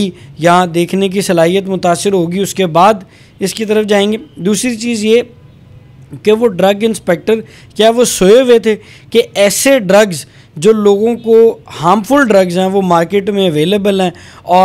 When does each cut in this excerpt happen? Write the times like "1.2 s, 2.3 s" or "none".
none